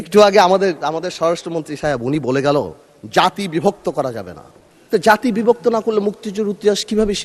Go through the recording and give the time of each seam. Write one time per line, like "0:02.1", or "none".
none